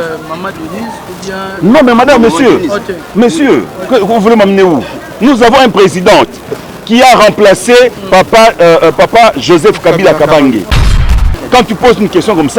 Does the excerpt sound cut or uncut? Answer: cut